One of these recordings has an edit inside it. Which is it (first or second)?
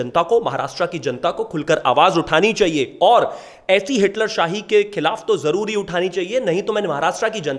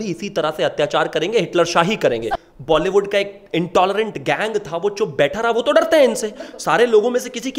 second